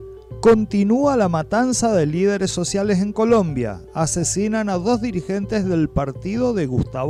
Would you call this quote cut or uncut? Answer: uncut